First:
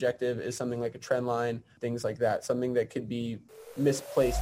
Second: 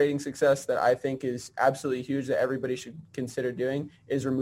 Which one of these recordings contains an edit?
first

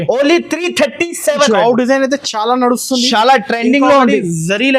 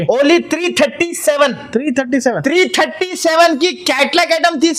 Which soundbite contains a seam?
first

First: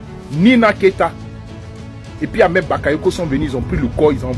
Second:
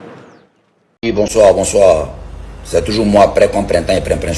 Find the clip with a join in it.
second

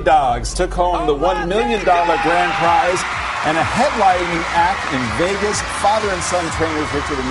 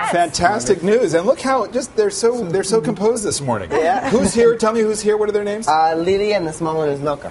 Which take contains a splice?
second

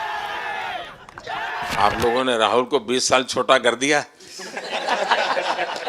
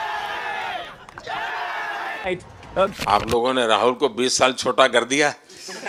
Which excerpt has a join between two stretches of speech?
first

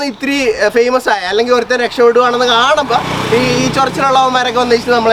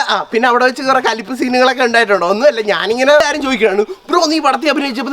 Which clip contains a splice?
second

